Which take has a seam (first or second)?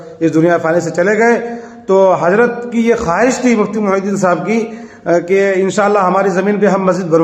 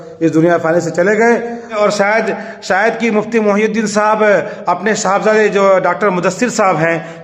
second